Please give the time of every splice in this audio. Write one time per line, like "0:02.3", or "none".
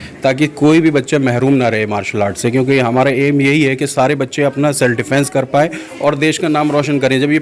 none